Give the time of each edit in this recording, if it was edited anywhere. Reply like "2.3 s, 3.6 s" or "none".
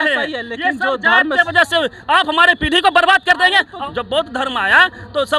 3.8 s